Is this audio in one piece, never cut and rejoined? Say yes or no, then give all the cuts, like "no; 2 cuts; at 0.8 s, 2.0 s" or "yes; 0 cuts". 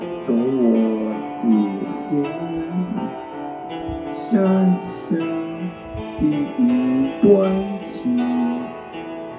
yes; 0 cuts